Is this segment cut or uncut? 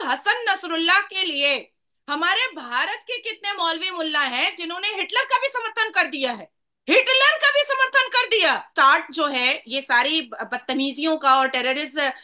cut